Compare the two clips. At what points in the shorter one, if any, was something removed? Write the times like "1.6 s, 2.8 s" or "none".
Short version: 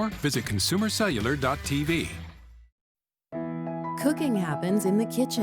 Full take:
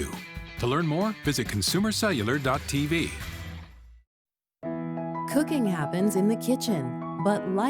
2.3 s